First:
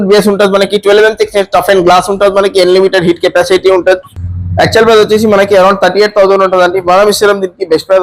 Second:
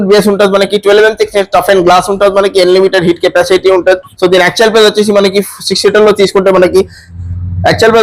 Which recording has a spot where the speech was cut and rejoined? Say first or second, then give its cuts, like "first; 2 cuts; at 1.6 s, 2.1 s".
first; 1 cut; at 4.1 s